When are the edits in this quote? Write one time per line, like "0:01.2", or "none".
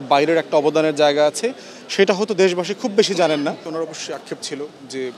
0:03.6